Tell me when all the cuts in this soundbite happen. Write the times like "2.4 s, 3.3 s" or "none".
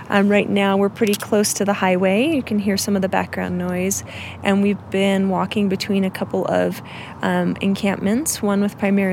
none